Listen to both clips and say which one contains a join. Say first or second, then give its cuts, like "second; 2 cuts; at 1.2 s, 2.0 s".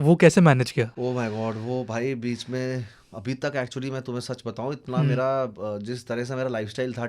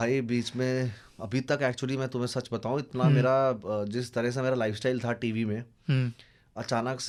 first; 1 cut; at 1.0 s